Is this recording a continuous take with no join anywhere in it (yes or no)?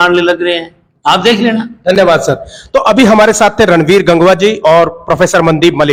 yes